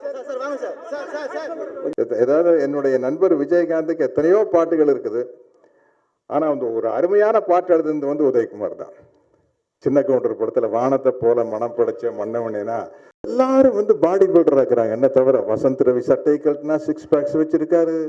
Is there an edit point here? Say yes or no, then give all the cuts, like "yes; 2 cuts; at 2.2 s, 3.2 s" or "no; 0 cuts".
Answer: yes; 2 cuts; at 1.9 s, 13.3 s